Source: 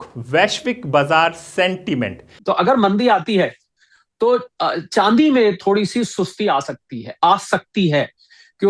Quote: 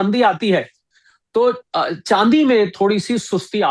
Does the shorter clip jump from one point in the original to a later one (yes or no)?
no